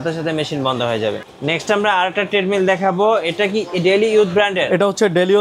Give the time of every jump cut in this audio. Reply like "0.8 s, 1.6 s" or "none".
none